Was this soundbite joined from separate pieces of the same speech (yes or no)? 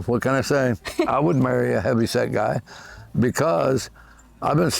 yes